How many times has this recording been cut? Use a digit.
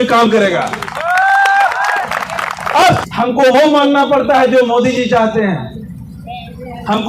1